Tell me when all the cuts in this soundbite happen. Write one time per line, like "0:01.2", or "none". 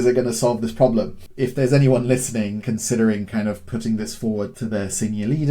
0:01.2
0:02.6
0:04.5